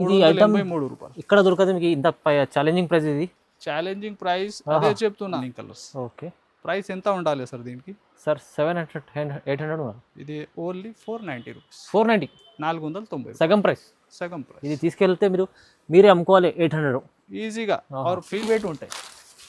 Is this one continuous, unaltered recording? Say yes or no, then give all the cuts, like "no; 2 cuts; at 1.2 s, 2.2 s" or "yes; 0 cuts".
no; 2 cuts; at 5.4 s, 18.4 s